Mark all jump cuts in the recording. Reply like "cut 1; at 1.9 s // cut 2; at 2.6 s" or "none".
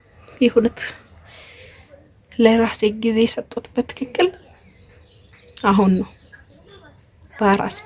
none